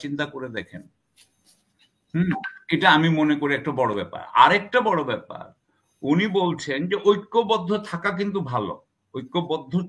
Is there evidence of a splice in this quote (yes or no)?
no